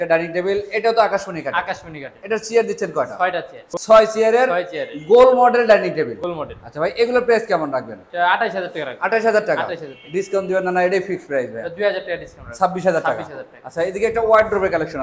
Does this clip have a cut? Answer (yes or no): no